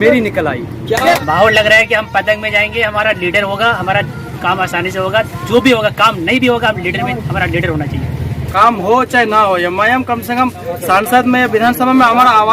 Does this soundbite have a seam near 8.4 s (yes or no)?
yes